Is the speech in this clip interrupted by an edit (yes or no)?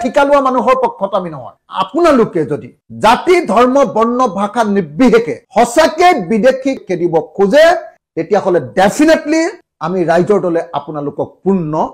yes